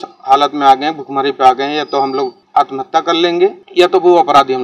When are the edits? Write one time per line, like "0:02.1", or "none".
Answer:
0:02.4
0:03.6